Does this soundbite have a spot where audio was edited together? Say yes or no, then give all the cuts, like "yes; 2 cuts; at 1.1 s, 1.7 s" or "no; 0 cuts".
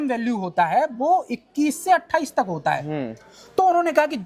no; 0 cuts